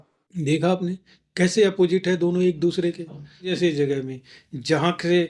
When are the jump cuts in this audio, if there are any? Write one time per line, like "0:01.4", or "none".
0:03.5